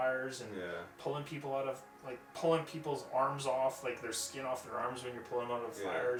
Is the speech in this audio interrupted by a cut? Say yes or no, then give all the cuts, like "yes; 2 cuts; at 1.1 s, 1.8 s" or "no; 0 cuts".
no; 0 cuts